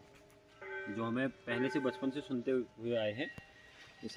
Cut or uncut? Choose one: uncut